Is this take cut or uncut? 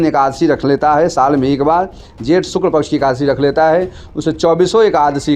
uncut